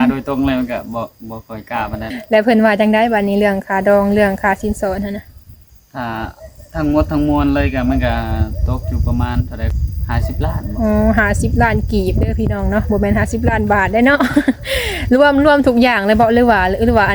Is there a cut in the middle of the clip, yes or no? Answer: yes